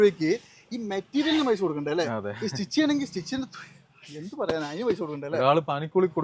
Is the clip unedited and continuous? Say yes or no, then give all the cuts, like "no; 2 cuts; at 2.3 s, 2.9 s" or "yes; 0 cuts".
yes; 0 cuts